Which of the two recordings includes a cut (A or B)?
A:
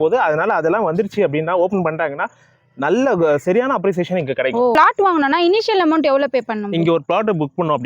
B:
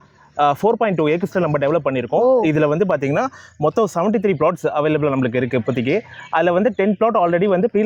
A